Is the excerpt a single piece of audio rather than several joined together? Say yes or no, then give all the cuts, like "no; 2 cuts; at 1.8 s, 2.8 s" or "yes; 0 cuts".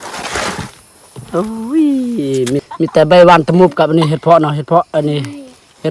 no; 1 cut; at 2.6 s